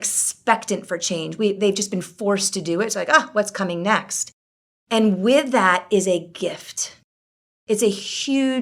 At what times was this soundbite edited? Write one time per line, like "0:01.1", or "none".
none